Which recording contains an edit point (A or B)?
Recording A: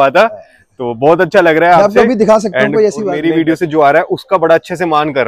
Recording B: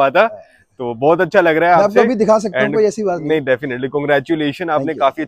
A